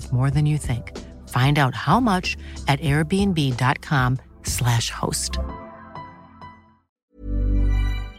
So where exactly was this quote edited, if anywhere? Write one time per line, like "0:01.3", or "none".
0:07.0